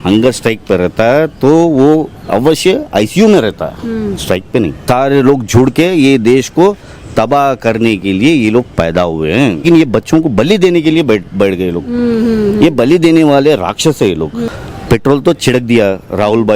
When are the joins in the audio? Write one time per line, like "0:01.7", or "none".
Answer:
0:04.8
0:09.6
0:14.4